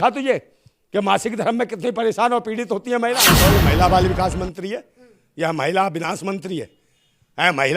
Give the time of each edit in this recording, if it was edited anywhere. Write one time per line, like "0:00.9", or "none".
0:03.4